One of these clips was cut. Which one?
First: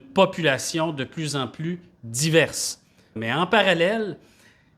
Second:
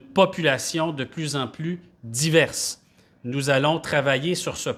first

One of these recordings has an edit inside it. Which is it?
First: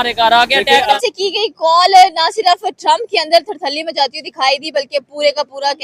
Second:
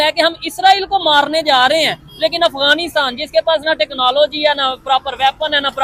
first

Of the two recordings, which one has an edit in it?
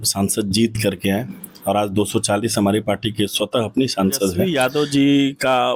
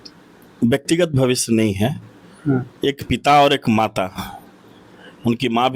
first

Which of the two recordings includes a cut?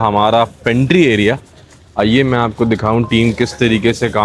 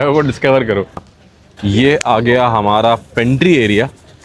second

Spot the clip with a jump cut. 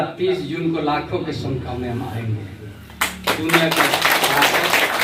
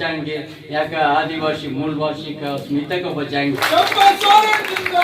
second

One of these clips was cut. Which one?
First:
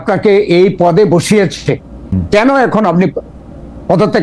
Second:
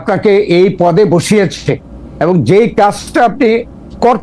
first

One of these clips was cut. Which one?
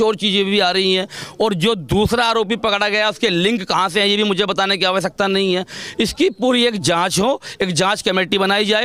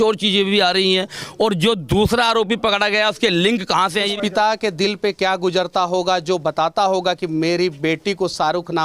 second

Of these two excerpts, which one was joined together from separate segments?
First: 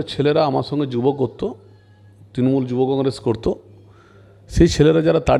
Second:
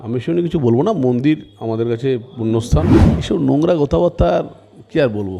second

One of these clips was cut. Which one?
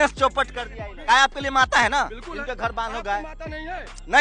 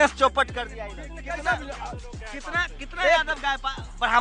first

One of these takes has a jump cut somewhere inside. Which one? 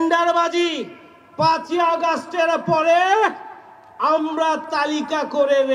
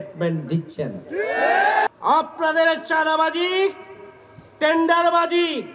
second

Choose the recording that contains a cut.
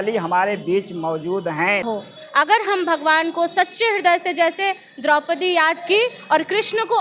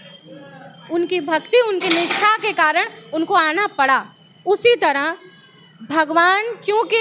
first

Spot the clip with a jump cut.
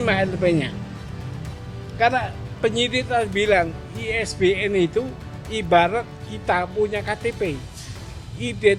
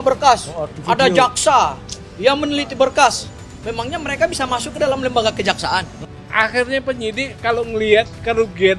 second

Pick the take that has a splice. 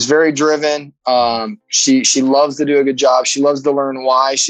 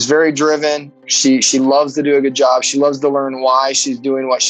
second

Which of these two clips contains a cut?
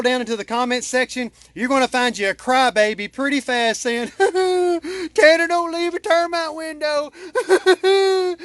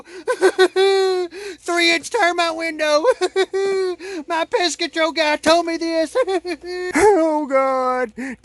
second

